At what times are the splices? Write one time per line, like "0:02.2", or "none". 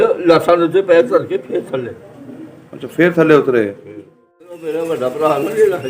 0:04.6